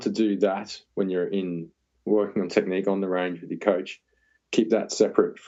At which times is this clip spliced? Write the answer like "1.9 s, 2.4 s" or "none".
none

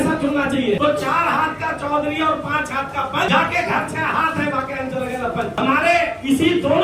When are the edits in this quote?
0.8 s, 3.3 s, 5.5 s

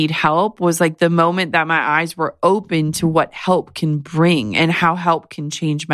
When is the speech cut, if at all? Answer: none

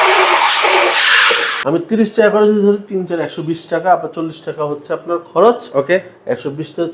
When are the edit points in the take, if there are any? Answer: 1.6 s

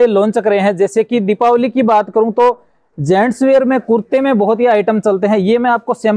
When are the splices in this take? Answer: none

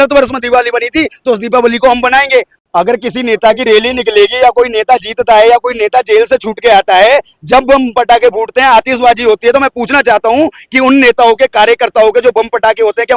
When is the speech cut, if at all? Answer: 2.5 s

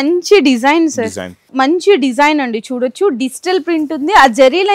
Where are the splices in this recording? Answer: 1.5 s

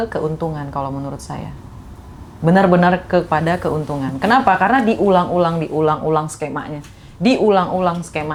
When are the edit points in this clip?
none

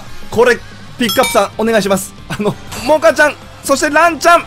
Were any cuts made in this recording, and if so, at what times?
2.7 s

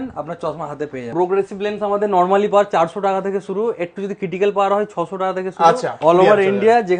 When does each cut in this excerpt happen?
1.1 s, 5.9 s

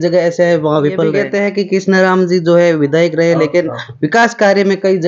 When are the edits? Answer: 1.2 s

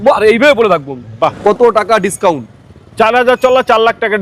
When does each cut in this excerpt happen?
1.4 s

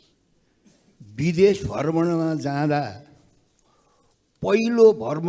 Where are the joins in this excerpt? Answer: none

